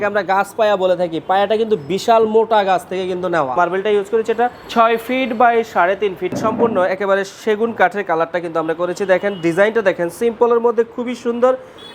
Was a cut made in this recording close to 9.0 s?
no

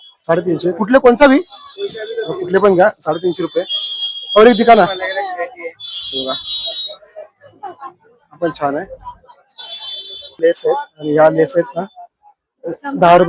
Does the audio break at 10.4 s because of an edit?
yes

